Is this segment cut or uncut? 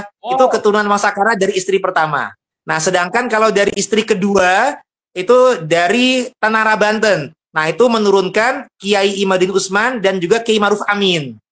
cut